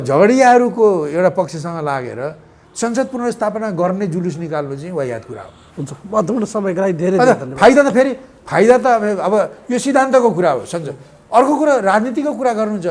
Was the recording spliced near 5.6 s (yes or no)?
no